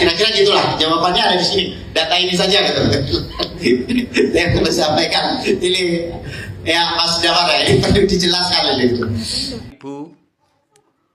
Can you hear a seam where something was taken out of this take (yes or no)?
yes